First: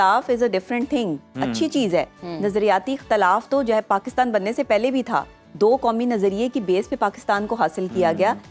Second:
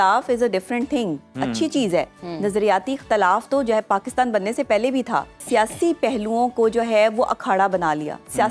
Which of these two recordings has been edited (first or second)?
second